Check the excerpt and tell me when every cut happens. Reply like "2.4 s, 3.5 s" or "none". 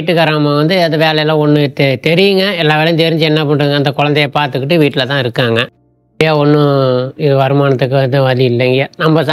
none